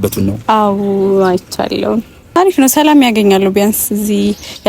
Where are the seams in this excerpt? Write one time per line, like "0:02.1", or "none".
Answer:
0:02.2